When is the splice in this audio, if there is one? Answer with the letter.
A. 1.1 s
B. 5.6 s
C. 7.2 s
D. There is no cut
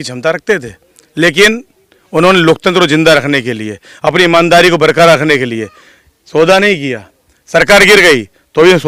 D